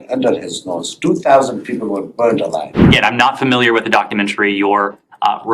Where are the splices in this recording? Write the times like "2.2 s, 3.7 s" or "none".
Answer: 2.9 s